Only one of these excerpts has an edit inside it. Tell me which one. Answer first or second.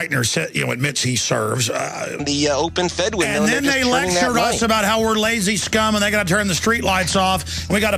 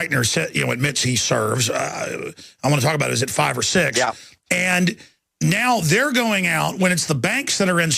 second